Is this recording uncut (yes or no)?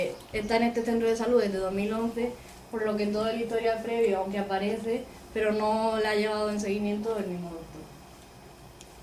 yes